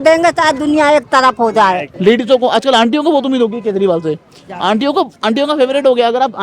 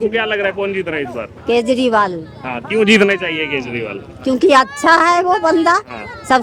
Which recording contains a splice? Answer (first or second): first